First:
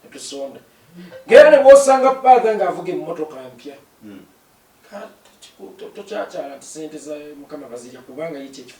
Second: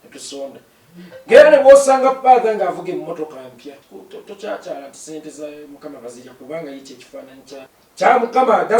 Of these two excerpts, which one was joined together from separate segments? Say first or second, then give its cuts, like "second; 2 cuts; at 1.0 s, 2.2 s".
second; 2 cuts; at 3.9 s, 7.8 s